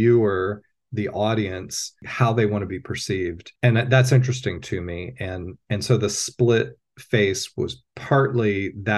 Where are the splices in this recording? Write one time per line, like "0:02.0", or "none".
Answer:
0:03.5